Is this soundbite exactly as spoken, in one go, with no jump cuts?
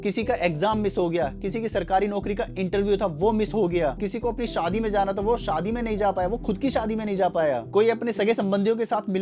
yes; 0 cuts

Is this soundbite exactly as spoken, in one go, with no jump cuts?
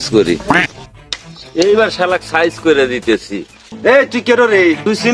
no; 1 cut; at 3.7 s

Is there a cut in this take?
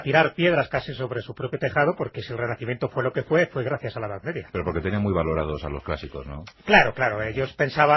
yes; 1 cut; at 4.1 s

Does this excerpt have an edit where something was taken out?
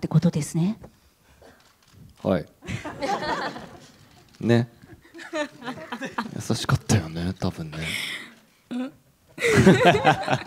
no; 0 cuts

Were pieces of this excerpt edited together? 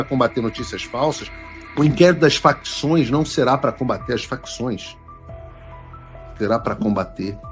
yes; 1 cut; at 1.3 s

